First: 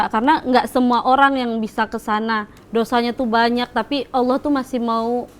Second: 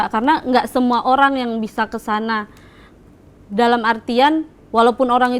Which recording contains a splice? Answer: first; 1 cut; at 2.5 s

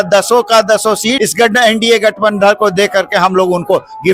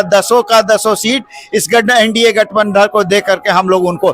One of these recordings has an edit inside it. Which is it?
first; 1 cut; at 1.2 s

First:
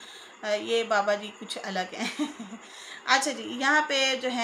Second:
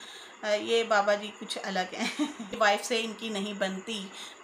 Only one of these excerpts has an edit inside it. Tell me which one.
second; 1 cut; at 2.5 s

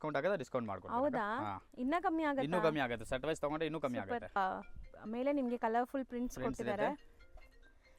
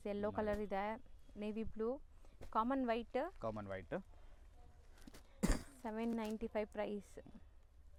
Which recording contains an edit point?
first; 1 cut; at 4.4 s

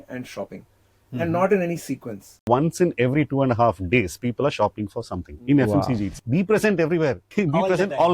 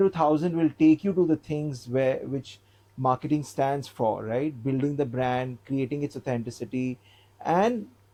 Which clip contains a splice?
first; 3 cuts; at 2.4 s, 6.1 s, 7.2 s

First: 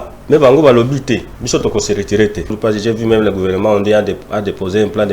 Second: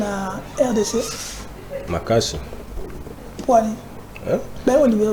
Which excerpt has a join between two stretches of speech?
first; 2 cuts; at 1.3 s, 2.6 s

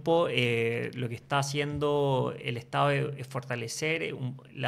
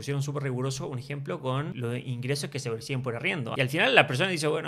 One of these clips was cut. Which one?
second; 2 cuts; at 1.7 s, 3.5 s

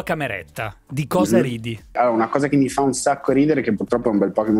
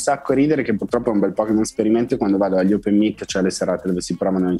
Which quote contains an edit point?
first; 1 cut; at 1.9 s

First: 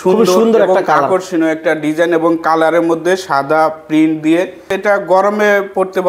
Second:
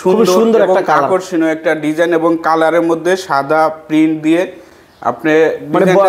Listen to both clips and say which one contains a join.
first; 1 cut; at 4.7 s

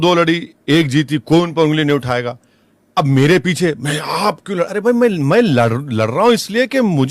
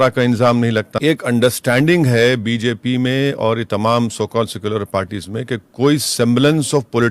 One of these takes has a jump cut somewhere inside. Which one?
second; 1 cut; at 0.9 s

